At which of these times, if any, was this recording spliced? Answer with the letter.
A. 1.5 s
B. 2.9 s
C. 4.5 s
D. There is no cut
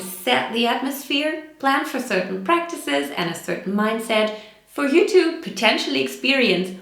A